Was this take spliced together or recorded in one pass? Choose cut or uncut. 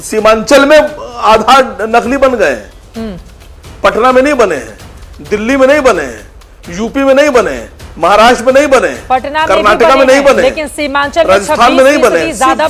cut